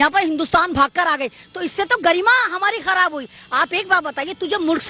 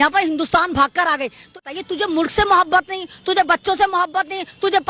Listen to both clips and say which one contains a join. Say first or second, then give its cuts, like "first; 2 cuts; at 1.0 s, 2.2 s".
second; 1 cut; at 1.6 s